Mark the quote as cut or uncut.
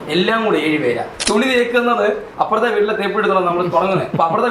cut